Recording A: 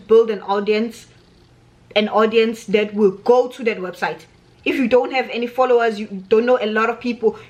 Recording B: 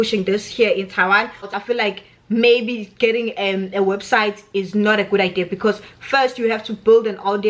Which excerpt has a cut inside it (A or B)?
B